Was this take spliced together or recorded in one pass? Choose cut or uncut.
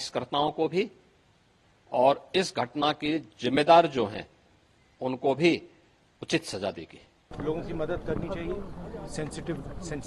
cut